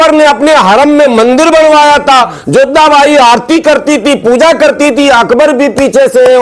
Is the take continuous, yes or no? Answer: yes